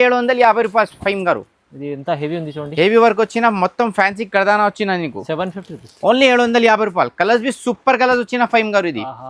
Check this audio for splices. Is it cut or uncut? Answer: uncut